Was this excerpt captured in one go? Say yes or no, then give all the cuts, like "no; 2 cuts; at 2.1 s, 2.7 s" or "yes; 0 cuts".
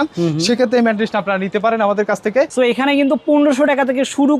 no; 1 cut; at 2.5 s